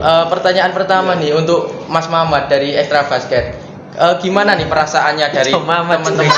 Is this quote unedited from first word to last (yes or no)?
yes